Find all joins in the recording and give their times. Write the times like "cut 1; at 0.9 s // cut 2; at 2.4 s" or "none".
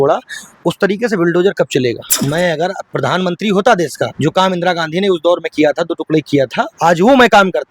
cut 1; at 2.1 s // cut 2; at 2.8 s // cut 3; at 4.1 s // cut 4; at 6.7 s